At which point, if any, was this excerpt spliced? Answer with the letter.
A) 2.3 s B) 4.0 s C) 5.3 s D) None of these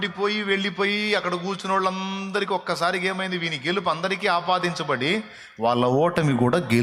D